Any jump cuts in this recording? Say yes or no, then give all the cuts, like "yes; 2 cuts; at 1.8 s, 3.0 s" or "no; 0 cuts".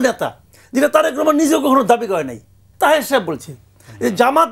yes; 1 cut; at 2.7 s